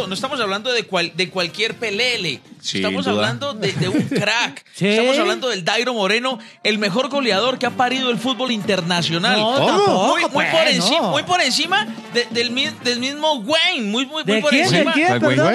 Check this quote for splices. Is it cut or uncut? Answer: uncut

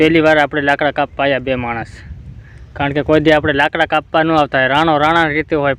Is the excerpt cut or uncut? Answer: uncut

